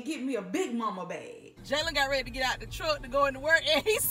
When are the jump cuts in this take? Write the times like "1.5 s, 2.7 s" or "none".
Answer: 1.5 s